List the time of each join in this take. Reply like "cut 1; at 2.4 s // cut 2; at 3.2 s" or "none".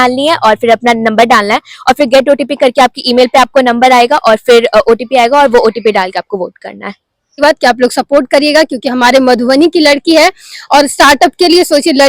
cut 1; at 7.4 s